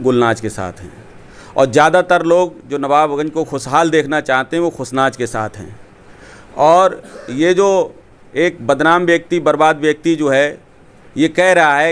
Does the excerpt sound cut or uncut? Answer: uncut